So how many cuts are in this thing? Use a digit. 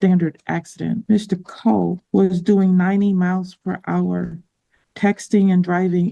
2